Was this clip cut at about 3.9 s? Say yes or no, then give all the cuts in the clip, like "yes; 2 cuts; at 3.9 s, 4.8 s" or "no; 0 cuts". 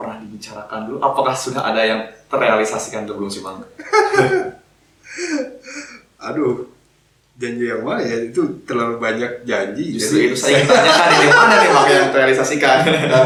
no; 0 cuts